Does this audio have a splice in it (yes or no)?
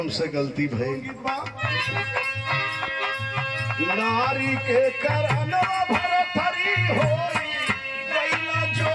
yes